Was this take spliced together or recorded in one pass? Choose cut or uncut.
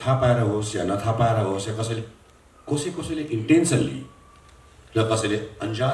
uncut